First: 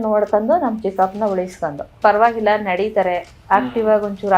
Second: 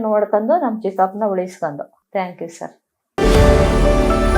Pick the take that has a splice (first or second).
first